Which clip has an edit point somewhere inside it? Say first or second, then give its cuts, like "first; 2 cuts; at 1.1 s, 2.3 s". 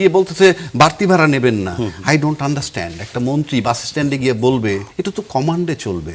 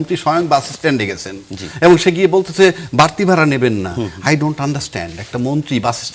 first; 1 cut; at 4.9 s